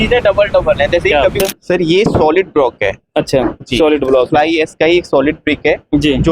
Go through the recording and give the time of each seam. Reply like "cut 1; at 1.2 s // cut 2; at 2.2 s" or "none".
cut 1; at 1.7 s

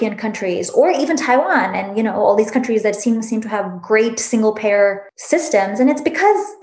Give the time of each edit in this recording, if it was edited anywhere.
cut 1; at 5.1 s

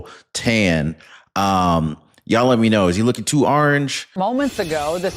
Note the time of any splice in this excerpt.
cut 1; at 4.1 s

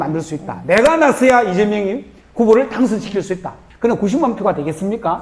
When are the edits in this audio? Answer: cut 1; at 3.6 s

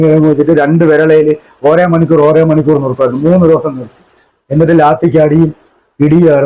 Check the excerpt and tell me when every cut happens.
none

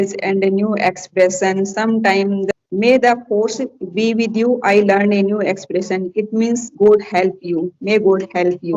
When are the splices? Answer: cut 1; at 2.5 s

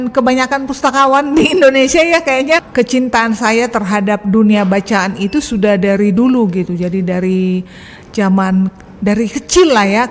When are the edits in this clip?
cut 1; at 2.7 s

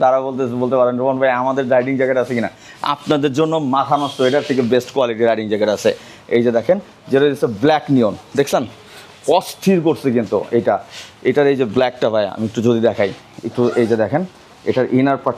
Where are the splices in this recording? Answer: none

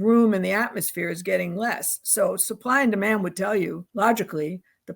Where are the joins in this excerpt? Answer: cut 1; at 3.8 s

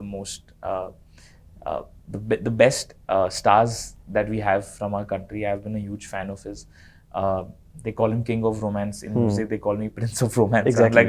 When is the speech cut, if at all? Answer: none

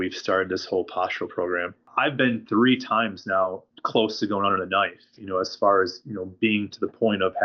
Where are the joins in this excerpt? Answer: cut 1; at 1.8 s // cut 2; at 3.7 s

